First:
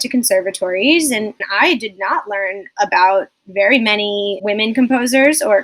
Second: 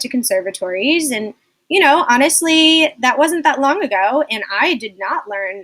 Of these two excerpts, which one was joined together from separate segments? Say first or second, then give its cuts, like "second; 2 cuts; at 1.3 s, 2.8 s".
first; 2 cuts; at 1.4 s, 4.4 s